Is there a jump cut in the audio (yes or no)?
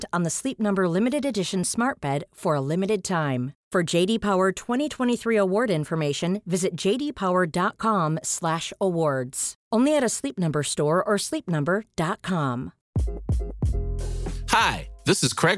yes